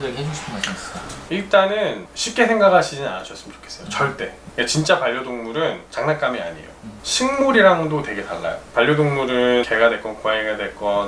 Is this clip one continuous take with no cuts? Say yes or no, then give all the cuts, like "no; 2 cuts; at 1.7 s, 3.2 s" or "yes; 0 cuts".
yes; 0 cuts